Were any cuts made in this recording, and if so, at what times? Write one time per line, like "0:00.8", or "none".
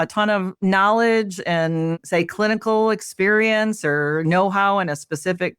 none